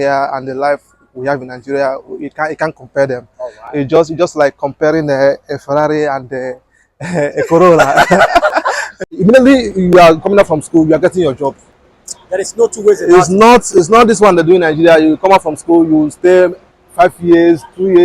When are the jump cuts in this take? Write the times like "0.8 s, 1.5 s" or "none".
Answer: 8.8 s